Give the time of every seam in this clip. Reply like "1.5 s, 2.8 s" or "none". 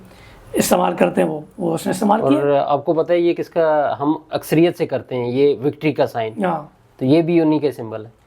none

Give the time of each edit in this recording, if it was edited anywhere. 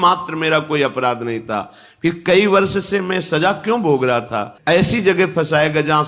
4.5 s

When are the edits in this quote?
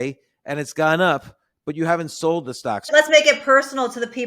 2.9 s

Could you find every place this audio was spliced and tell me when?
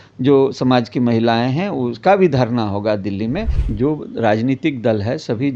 3.6 s

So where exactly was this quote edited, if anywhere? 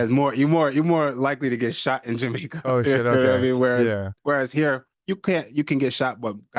none

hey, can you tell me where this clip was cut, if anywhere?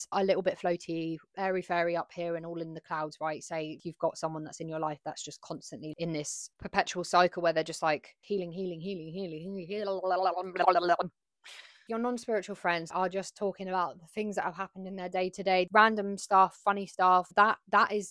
none

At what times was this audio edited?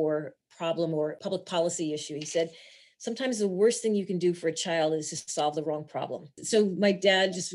1.2 s, 6.4 s

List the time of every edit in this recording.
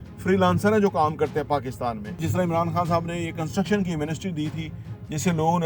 2.2 s

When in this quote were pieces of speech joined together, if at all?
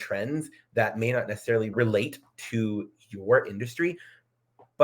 1.7 s

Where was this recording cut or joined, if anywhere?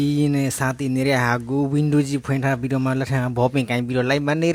none

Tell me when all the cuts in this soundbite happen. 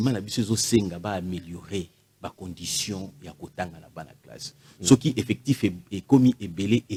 none

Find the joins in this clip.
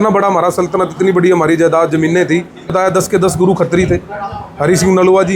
2.7 s

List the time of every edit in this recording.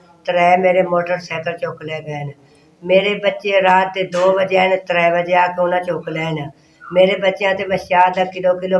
none

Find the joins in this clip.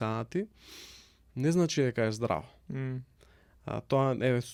none

